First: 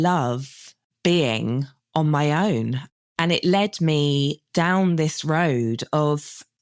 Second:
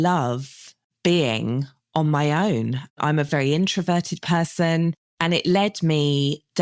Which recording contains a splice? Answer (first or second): first